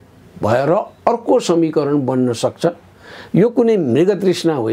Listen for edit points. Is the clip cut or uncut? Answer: uncut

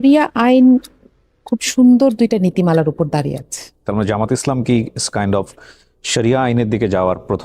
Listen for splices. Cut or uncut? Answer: cut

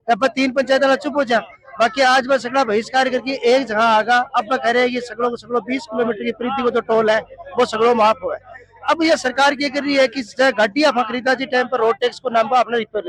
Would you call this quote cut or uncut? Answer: uncut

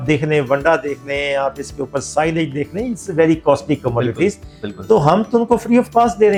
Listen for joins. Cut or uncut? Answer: uncut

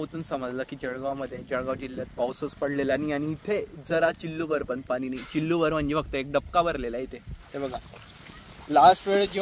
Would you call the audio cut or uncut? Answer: uncut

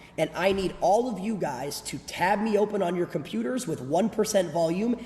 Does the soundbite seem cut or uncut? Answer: uncut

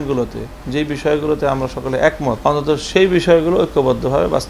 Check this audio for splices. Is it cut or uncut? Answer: cut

